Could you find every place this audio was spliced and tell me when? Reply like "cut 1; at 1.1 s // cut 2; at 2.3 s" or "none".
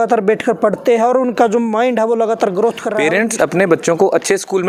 cut 1; at 2.9 s